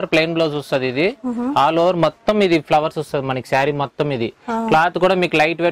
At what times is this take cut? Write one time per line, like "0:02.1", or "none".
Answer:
none

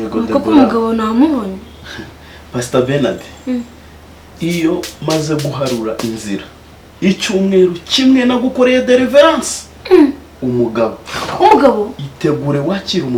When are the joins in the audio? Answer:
none

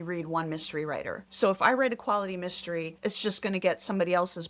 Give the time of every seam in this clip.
0:01.2
0:02.9

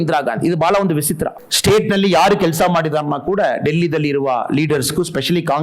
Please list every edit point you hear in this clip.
0:01.4

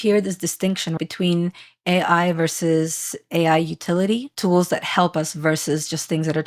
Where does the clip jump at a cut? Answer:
0:00.9
0:04.3

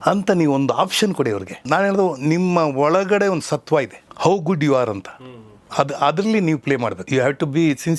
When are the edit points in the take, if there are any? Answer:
0:01.6
0:04.0
0:07.0

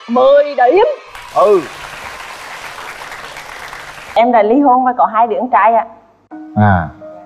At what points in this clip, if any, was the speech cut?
0:04.2

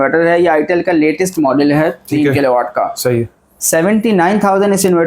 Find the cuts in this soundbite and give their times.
none

